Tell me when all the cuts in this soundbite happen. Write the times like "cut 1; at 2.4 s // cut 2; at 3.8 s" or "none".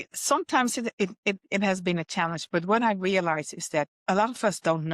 cut 1; at 4.0 s